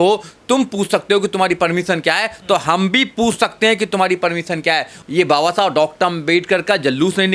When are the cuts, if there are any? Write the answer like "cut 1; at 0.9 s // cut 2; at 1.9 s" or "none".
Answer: cut 1; at 4.9 s